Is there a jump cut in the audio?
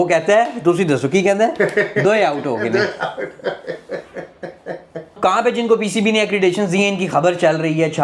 yes; 1 cut; at 5.2 s

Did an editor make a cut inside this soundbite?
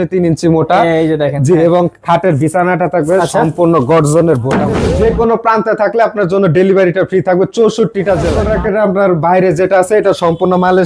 yes; 2 cuts; at 4.8 s, 8.4 s

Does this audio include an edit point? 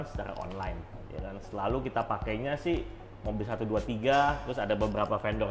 no; 0 cuts

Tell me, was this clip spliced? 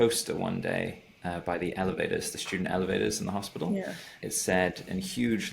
no; 0 cuts

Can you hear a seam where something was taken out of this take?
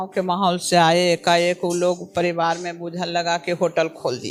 no; 0 cuts

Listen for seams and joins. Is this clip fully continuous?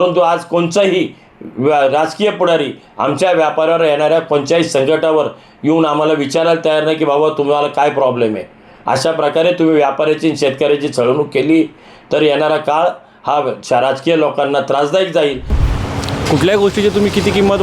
no; 1 cut; at 15.6 s

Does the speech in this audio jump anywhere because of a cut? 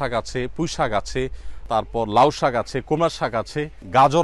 no; 0 cuts

